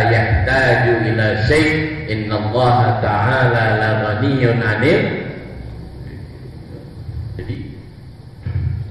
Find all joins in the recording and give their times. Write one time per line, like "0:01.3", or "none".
0:07.4